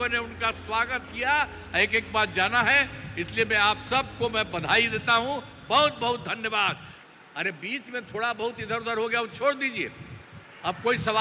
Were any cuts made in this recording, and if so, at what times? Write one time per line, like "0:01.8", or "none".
0:06.9

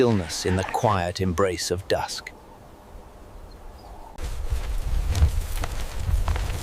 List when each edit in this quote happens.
0:04.2

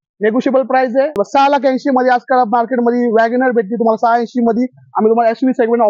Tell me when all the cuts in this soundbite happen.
0:01.2

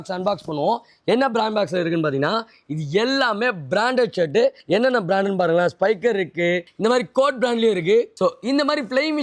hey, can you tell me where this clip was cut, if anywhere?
0:04.6
0:06.7
0:08.1

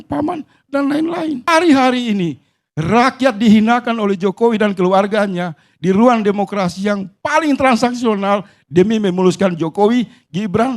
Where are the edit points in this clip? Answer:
0:01.5

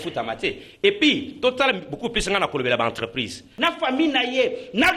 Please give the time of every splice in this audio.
0:03.5

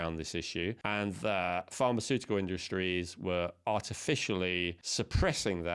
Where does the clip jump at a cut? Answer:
0:00.8
0:04.8

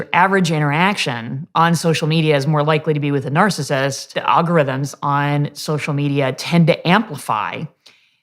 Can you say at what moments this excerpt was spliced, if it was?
0:04.1

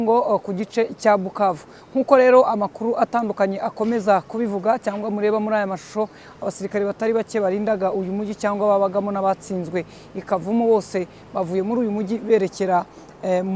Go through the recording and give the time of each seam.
none

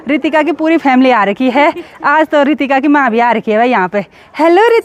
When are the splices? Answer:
none

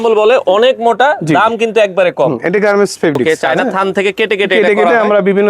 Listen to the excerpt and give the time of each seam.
0:03.4

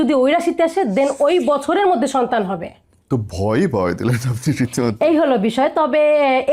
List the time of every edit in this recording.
none

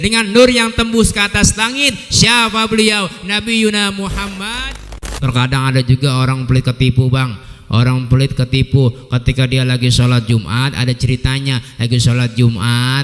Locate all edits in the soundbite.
0:05.1

